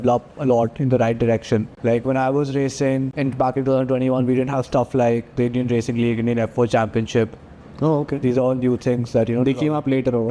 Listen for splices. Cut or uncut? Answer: cut